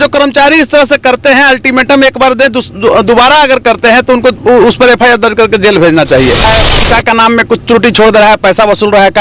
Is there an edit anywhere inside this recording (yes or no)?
yes